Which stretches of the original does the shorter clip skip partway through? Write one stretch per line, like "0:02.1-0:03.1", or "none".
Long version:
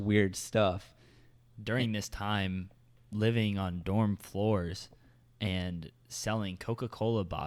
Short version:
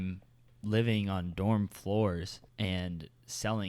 0:04.9-0:05.2